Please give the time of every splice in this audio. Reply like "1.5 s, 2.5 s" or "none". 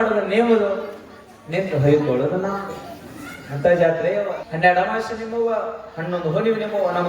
4.4 s